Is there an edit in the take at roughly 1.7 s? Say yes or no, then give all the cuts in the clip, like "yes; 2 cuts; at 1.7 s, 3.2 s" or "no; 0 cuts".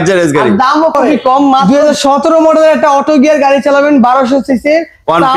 yes; 1 cut; at 1.7 s